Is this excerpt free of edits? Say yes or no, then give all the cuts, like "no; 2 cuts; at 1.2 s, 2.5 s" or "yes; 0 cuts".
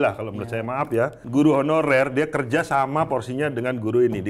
no; 1 cut; at 1.2 s